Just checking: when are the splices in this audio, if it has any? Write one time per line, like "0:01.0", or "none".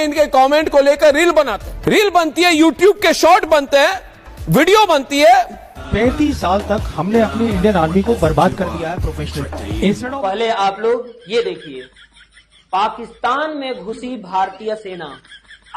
0:01.7
0:05.9
0:10.0